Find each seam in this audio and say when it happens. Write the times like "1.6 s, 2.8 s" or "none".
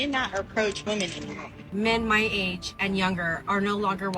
1.7 s